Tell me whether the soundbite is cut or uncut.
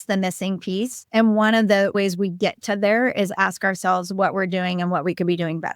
cut